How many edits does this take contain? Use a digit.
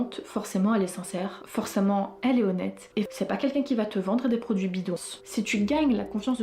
2